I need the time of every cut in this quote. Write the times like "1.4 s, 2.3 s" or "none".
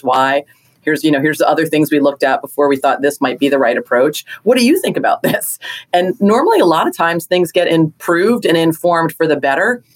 7.7 s